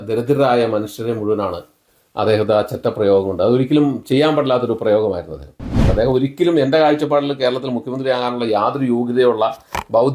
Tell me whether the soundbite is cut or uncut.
cut